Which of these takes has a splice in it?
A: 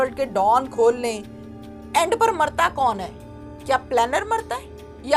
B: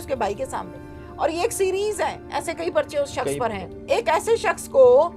B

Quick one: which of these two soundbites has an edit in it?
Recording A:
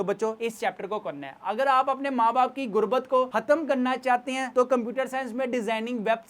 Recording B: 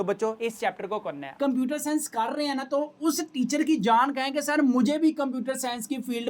B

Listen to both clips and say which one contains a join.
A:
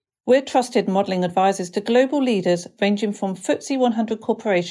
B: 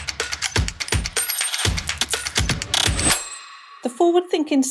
B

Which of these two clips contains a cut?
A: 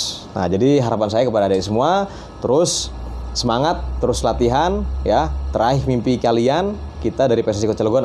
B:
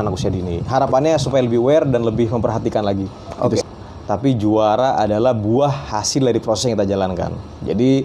B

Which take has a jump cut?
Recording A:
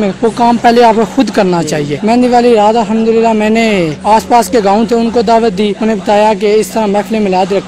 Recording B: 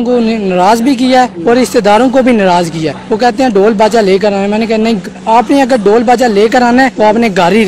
A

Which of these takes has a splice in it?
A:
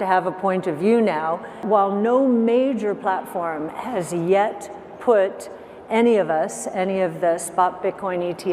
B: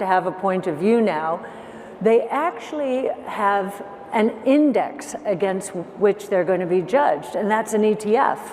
A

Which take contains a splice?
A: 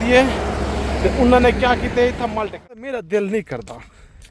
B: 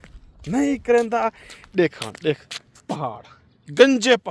A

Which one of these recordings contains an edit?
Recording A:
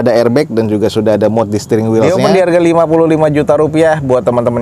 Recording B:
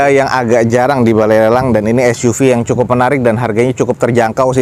A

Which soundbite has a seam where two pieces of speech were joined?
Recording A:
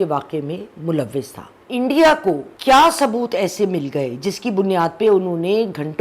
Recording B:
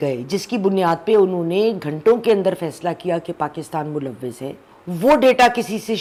A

